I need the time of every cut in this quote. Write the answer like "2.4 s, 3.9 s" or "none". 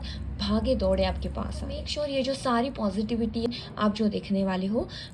1.8 s, 3.5 s